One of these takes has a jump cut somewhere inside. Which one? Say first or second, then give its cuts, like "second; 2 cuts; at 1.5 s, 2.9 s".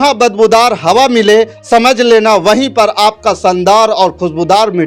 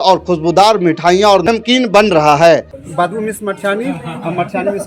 second; 1 cut; at 2.7 s